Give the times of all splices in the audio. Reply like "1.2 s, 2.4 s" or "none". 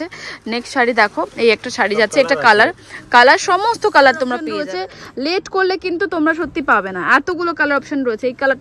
4.5 s